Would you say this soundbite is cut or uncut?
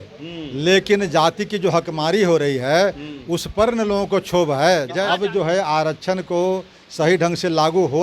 cut